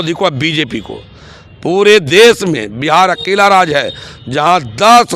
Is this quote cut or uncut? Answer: uncut